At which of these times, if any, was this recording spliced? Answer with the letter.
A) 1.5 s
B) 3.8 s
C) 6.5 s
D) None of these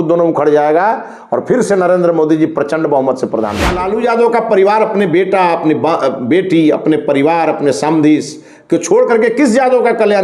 B